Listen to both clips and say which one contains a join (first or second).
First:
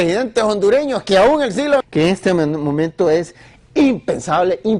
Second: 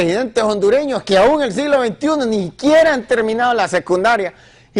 second